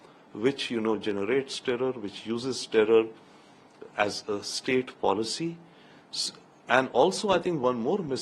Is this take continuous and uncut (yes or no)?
yes